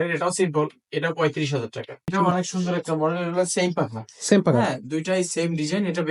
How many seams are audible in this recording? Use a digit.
1